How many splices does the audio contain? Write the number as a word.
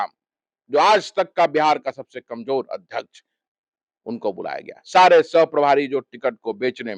zero